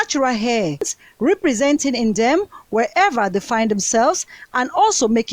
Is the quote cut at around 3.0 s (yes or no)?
no